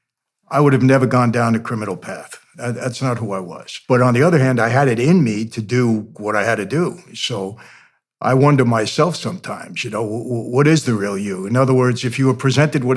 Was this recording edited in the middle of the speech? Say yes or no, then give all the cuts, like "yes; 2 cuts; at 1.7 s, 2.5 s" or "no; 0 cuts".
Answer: yes; 1 cut; at 3.7 s